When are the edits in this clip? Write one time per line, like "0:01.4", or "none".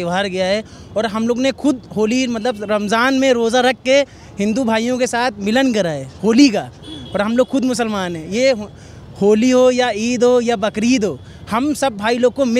none